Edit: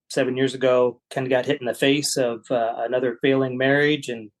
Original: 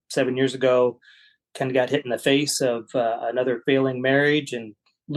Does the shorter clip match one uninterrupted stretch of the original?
no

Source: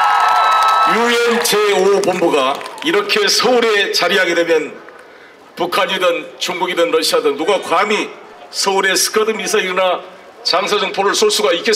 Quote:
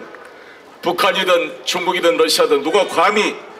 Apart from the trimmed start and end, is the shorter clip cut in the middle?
no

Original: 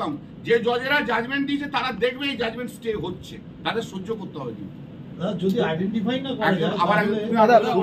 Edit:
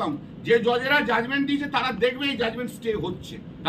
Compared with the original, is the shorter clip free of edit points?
yes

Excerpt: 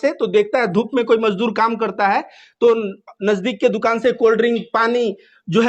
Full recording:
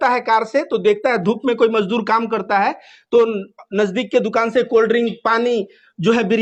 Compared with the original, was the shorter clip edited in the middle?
no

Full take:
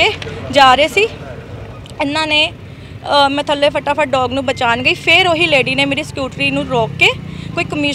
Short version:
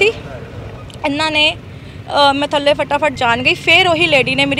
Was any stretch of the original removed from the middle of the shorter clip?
yes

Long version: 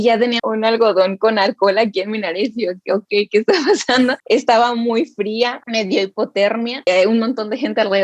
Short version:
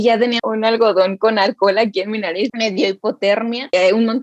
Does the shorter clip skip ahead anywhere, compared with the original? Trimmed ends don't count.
yes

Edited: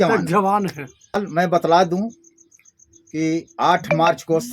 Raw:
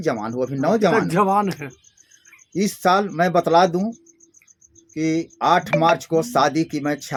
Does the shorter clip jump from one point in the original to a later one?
yes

